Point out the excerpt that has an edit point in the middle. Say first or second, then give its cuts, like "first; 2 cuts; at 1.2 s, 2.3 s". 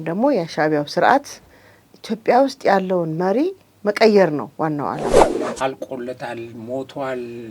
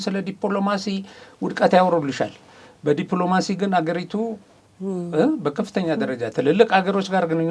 first; 1 cut; at 5.1 s